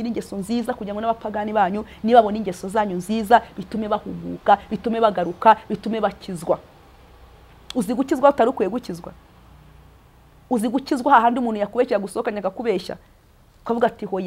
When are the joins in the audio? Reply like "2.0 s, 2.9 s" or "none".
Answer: none